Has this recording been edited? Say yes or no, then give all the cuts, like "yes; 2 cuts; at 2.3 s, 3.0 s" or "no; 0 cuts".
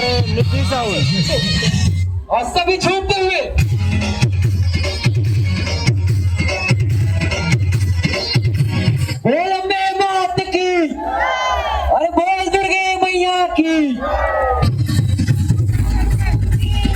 no; 0 cuts